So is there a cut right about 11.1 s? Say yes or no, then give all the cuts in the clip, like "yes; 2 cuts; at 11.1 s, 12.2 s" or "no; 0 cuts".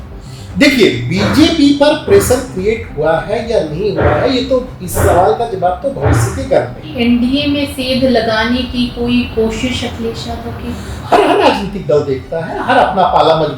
yes; 2 cuts; at 6.8 s, 11.1 s